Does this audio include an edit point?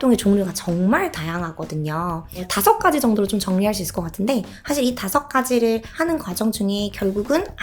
yes; 3 cuts; at 2.5 s, 4.5 s, 5.9 s

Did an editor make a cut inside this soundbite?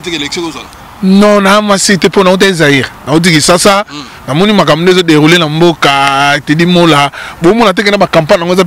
no; 0 cuts

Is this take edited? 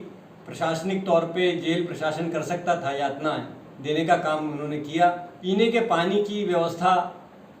yes; 1 cut; at 5.3 s

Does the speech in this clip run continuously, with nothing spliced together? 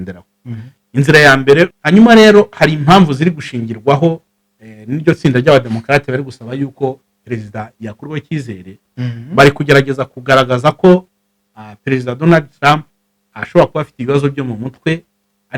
no; 1 cut; at 1.8 s

